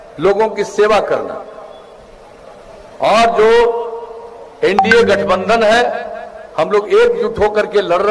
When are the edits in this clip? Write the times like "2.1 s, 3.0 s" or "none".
none